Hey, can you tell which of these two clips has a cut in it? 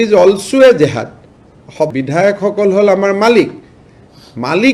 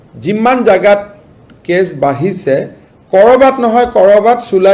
first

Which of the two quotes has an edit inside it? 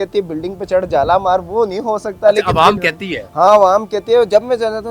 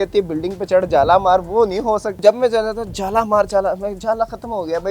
second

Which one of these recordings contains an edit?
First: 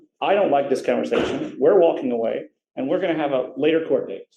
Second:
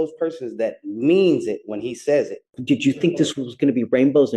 second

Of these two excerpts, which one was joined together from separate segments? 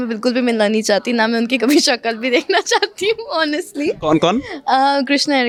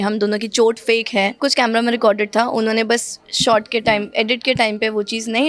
second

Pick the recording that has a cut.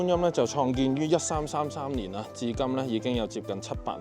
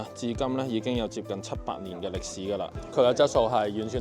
second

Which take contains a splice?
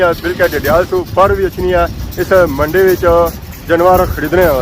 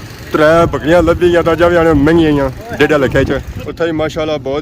second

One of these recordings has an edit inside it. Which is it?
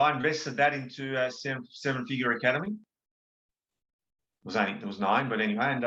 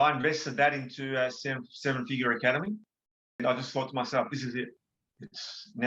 second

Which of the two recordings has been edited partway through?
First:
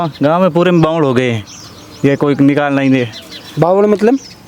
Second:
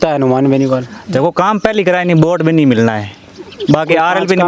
second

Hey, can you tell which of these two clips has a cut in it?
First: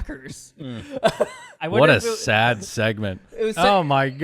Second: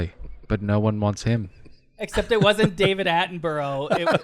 first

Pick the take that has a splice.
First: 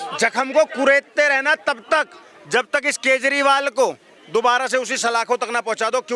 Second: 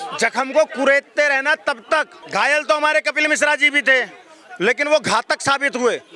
second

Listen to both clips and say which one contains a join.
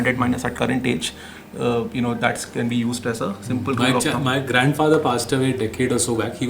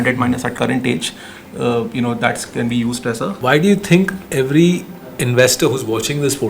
second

